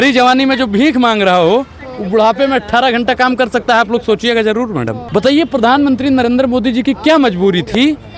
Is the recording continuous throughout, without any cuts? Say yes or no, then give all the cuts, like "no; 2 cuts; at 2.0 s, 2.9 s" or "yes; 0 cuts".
no; 1 cut; at 5.0 s